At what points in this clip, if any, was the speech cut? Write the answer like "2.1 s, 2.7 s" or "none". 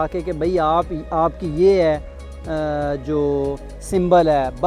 none